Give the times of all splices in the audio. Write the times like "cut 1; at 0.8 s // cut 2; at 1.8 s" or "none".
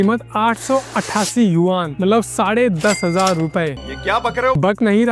none